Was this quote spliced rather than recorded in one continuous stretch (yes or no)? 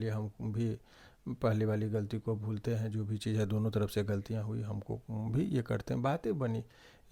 no